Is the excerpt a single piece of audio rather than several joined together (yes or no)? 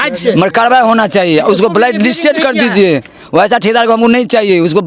yes